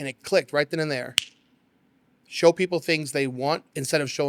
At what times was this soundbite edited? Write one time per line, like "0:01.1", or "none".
none